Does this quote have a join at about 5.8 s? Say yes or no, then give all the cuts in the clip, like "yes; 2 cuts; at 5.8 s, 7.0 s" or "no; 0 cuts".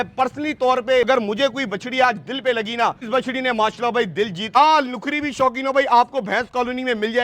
no; 3 cuts; at 1.1 s, 3.0 s, 4.5 s